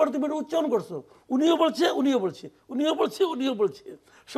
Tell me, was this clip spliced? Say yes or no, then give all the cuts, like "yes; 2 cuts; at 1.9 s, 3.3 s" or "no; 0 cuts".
no; 0 cuts